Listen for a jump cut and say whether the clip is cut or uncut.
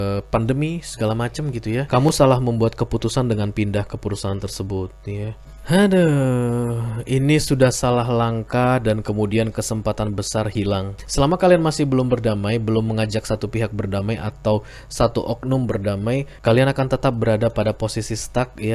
cut